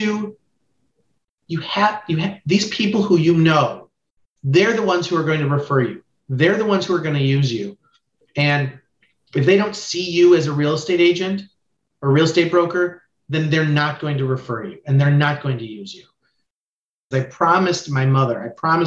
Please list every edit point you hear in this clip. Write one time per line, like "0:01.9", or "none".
0:16.7